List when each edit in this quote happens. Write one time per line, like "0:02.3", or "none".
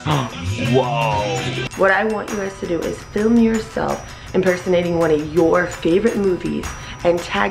0:01.6